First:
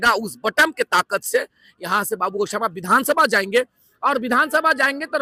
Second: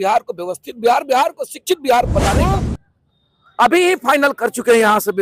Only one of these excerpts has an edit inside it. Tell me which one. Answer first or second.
second